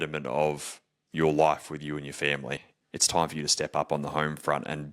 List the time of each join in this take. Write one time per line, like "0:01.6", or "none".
0:02.8